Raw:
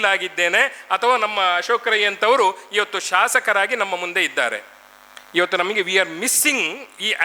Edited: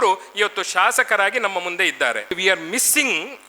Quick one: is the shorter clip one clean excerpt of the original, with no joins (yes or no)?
no